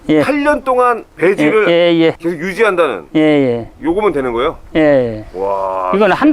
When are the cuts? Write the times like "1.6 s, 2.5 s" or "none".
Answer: 1.1 s, 2.2 s

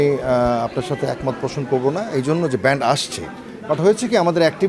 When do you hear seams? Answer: none

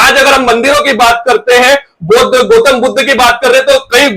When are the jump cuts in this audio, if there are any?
none

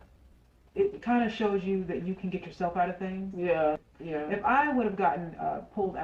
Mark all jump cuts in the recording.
3.8 s

